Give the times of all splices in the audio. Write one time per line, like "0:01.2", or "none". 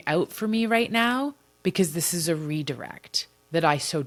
none